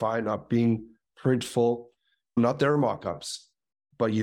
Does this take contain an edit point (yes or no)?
yes